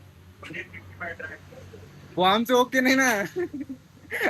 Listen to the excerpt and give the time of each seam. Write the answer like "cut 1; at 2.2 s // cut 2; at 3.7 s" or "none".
cut 1; at 2.1 s

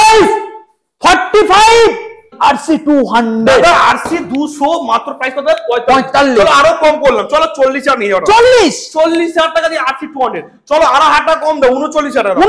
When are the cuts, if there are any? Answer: cut 1; at 2.3 s

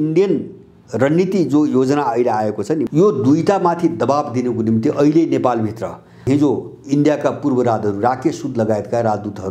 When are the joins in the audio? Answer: cut 1; at 2.8 s // cut 2; at 6.2 s

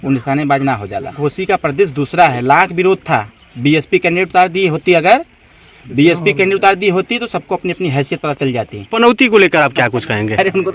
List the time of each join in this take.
cut 1; at 1.2 s // cut 2; at 8.9 s

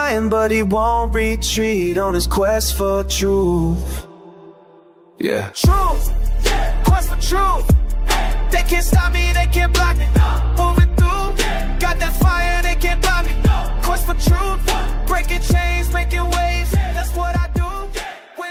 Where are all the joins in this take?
none

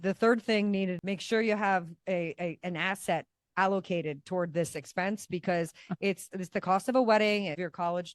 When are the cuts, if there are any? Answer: cut 1; at 1.0 s

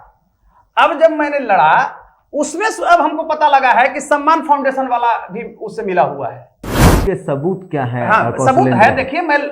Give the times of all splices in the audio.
cut 1; at 6.9 s

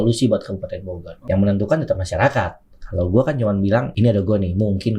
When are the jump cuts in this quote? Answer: cut 1; at 1.2 s // cut 2; at 3.9 s

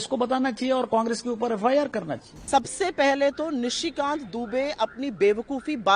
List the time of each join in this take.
cut 1; at 2.4 s

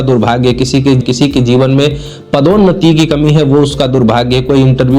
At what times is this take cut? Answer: cut 1; at 1.0 s

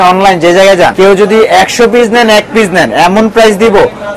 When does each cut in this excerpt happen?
cut 1; at 0.9 s

